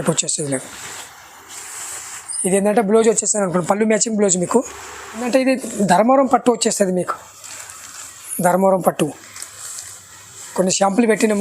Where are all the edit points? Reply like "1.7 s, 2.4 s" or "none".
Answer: 5.2 s